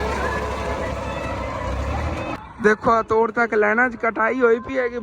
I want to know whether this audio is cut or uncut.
uncut